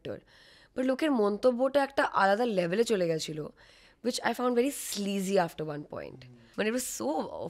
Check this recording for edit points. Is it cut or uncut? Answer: cut